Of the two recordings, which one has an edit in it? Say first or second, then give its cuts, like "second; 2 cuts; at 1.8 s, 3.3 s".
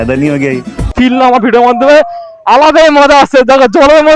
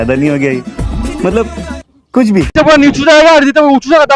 first; 1 cut; at 0.9 s